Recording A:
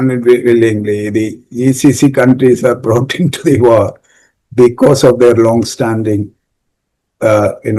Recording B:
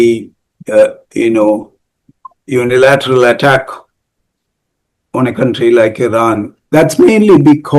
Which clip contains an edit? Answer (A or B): B